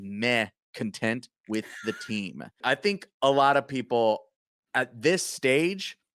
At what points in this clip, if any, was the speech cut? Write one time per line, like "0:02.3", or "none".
0:02.6